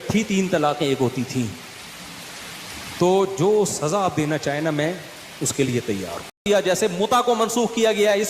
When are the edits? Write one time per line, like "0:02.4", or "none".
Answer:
0:06.4